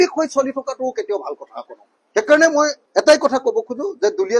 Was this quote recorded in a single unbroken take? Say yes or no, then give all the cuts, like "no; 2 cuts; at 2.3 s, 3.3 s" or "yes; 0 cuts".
yes; 0 cuts